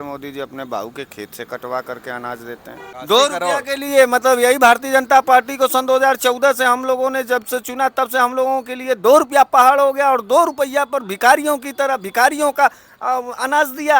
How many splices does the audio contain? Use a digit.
1